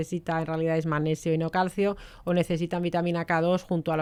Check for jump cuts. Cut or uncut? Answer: uncut